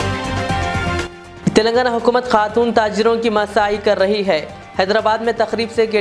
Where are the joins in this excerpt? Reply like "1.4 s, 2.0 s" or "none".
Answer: 0.9 s